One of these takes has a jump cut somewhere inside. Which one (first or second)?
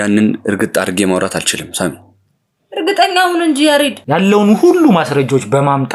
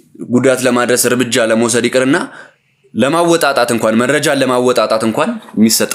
first